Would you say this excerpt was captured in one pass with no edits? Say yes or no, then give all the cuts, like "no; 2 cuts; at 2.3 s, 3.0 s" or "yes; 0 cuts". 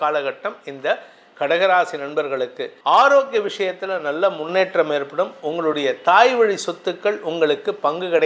no; 1 cut; at 2.7 s